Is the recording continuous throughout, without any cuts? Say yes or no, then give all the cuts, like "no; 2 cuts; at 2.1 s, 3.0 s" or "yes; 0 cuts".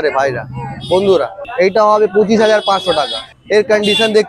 no; 2 cuts; at 1.5 s, 3.3 s